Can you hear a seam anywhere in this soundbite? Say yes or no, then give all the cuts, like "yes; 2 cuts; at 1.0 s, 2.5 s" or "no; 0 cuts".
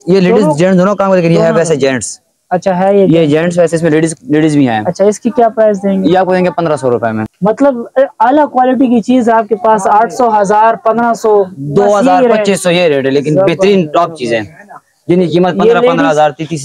no; 0 cuts